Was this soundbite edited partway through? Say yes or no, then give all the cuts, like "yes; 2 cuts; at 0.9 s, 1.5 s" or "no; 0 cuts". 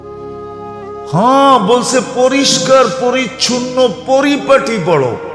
yes; 1 cut; at 1.1 s